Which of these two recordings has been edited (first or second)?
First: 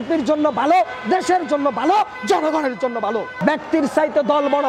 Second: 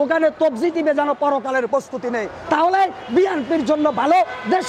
first